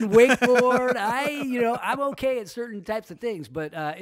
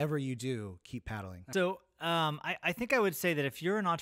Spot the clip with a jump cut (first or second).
second